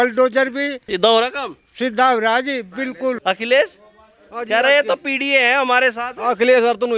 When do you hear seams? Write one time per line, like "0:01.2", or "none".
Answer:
0:03.2